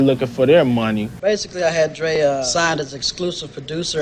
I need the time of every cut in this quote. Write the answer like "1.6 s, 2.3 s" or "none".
1.1 s, 2.5 s